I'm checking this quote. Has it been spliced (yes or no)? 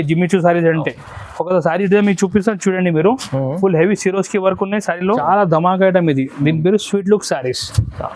yes